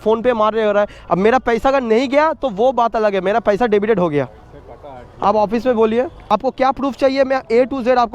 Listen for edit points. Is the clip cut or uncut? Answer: cut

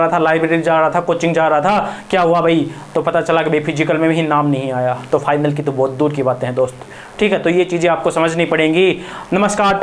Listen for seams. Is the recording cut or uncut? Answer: uncut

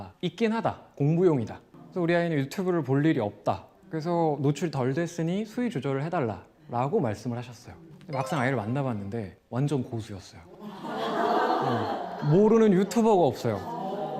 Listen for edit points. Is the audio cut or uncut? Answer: uncut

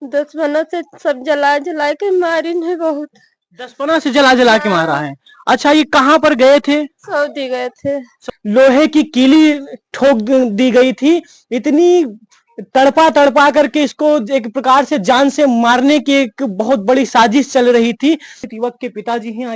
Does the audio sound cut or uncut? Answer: cut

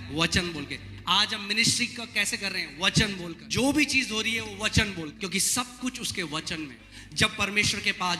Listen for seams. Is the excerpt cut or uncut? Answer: cut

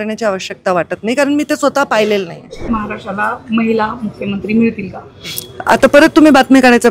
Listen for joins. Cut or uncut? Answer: cut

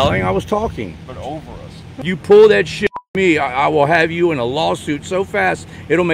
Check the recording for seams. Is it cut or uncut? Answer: cut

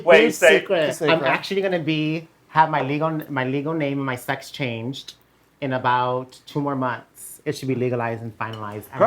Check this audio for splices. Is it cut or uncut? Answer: cut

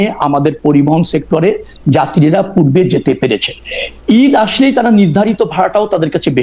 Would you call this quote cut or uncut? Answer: uncut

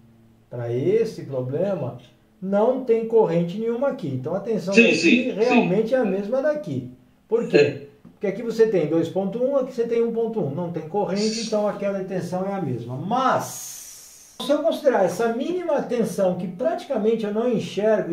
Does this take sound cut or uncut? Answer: cut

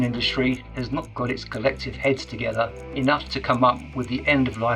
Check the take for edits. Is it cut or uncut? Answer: cut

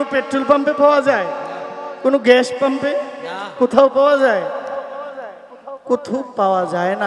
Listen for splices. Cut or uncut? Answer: uncut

